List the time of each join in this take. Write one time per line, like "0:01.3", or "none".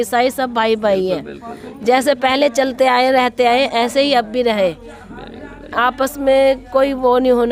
none